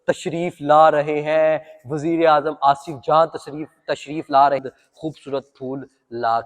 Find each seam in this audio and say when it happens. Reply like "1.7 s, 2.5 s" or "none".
4.6 s